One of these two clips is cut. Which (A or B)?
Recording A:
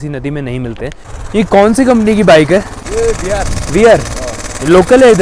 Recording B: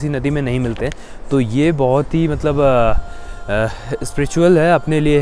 A